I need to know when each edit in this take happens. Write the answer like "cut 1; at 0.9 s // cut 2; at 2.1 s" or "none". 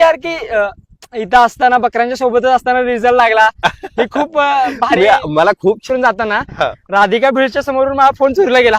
cut 1; at 5.8 s